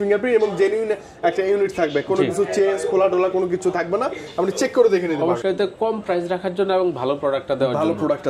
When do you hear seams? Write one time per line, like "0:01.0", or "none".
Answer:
0:05.4